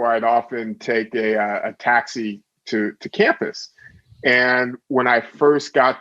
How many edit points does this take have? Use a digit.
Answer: 0